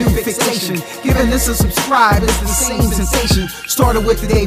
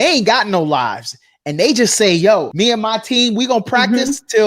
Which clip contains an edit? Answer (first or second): second